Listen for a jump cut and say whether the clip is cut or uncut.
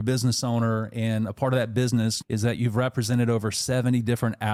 uncut